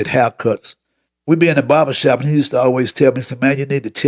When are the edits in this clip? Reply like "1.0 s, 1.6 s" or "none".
none